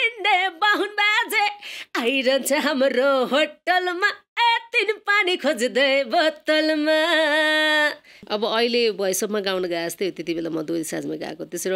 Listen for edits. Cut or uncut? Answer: cut